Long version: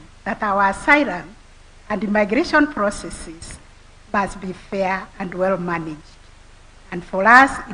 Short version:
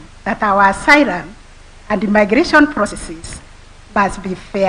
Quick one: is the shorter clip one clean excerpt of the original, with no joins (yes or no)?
no